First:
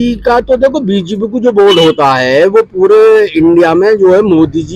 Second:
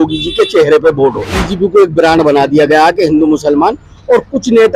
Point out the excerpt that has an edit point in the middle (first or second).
second